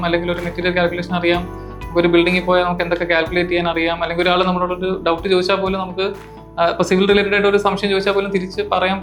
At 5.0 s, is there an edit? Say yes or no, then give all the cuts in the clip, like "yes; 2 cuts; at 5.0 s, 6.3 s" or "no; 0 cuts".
no; 0 cuts